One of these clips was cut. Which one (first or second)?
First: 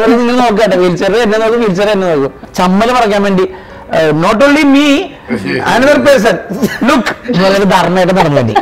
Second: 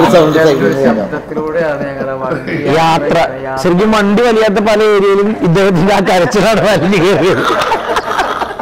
first